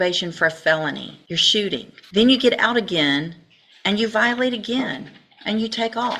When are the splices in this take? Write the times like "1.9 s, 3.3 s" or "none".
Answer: 1.1 s, 2.0 s